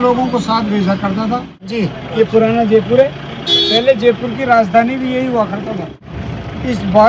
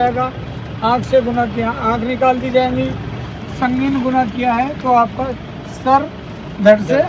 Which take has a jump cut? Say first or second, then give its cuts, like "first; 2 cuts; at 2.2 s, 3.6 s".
first; 2 cuts; at 1.6 s, 6.0 s